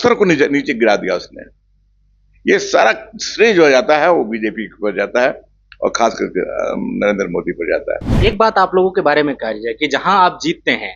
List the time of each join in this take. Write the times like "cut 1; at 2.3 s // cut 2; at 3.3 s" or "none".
cut 1; at 8.0 s